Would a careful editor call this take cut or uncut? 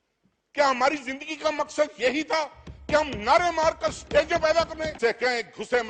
cut